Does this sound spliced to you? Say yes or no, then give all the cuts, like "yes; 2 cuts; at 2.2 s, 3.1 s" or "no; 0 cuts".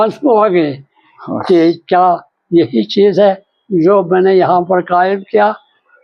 no; 0 cuts